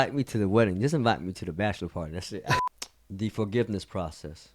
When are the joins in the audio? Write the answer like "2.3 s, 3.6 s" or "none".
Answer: 2.6 s